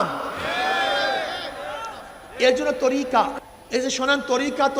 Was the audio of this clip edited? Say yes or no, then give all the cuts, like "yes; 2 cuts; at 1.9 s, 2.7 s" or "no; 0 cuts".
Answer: yes; 1 cut; at 3.4 s